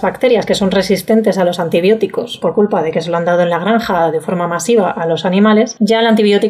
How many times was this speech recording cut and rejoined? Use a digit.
2